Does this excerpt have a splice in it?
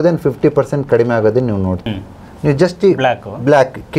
yes; 1 cut; at 1.8 s

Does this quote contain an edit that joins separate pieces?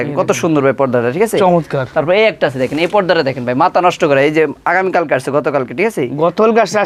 no; 0 cuts

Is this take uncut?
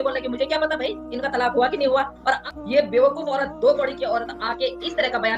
no; 1 cut; at 2.4 s

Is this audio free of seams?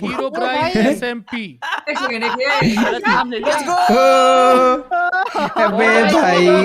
yes; 0 cuts

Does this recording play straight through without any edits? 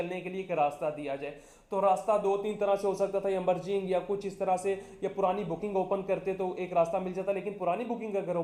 yes; 0 cuts

